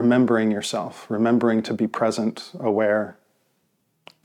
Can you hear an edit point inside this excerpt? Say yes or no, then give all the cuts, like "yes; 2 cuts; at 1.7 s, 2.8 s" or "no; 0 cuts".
no; 0 cuts